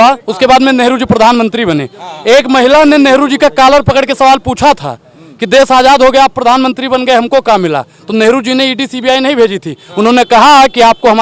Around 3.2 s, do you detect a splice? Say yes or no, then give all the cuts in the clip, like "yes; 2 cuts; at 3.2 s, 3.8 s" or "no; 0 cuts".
no; 0 cuts